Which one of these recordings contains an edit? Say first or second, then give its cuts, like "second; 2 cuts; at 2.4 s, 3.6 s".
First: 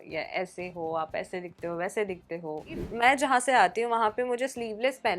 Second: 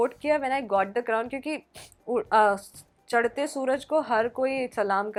first; 1 cut; at 2.8 s